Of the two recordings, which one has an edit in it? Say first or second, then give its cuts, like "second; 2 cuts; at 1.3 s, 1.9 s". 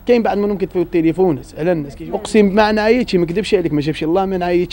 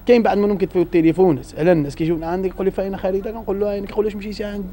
first; 1 cut; at 2.0 s